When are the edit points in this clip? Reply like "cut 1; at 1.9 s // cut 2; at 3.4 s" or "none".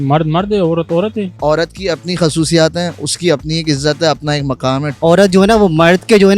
cut 1; at 1.4 s // cut 2; at 4.9 s